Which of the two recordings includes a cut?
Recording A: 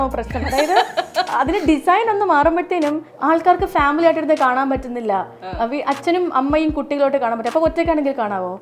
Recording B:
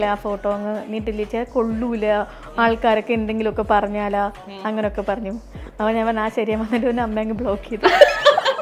A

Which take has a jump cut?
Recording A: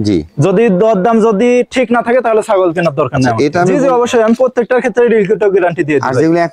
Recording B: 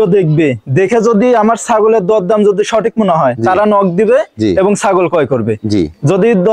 A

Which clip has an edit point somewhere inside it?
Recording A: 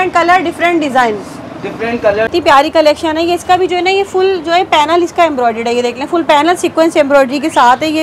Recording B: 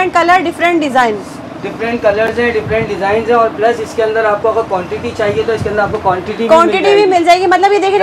A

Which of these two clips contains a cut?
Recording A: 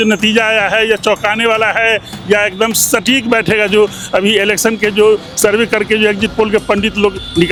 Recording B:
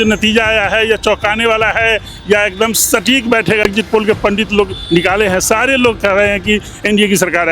B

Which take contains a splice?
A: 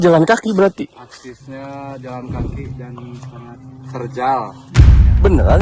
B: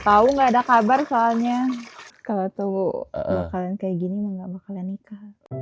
B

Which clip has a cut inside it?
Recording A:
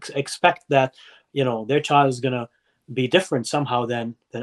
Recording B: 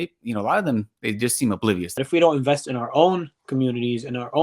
B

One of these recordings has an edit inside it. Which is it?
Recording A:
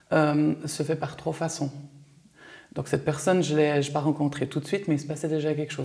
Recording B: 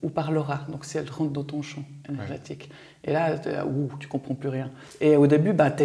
B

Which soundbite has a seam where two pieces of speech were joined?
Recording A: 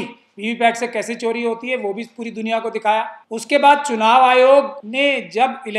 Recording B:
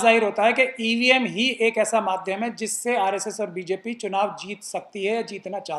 A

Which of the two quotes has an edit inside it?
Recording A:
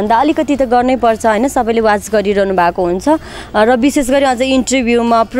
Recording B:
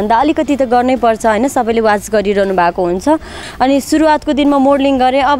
B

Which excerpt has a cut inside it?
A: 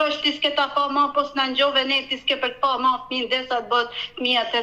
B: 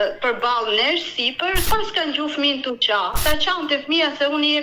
B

